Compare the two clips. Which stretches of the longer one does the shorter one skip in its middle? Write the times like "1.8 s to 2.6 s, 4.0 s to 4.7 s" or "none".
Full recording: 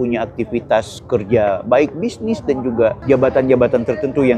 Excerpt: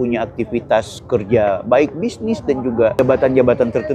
3.0 s to 3.1 s